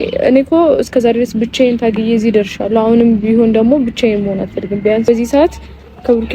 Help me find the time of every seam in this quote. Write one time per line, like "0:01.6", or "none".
0:05.1